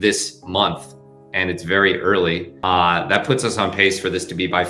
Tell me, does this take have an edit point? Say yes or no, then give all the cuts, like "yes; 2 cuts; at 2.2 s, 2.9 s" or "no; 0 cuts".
yes; 1 cut; at 2.5 s